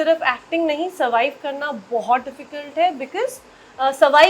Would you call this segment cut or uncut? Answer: uncut